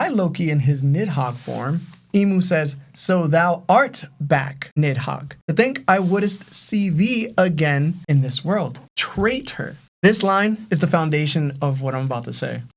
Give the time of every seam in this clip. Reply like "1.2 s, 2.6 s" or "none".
none